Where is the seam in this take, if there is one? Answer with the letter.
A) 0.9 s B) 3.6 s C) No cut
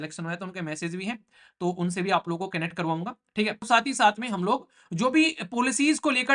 B